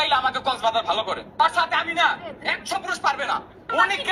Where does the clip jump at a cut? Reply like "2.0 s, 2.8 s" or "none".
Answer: none